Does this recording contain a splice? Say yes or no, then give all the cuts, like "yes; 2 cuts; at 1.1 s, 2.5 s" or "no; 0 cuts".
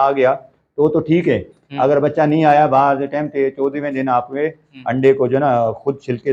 no; 0 cuts